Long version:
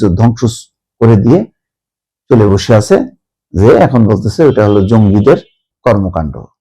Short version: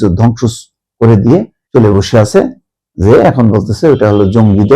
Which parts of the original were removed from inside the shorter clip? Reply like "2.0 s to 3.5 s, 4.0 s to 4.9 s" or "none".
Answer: 1.6 s to 2.1 s